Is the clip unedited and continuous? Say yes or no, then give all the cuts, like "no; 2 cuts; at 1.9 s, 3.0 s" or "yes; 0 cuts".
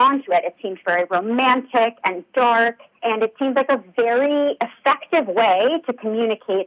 yes; 0 cuts